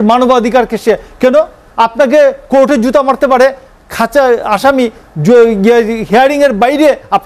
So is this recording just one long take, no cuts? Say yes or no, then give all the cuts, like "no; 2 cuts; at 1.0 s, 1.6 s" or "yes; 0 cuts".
yes; 0 cuts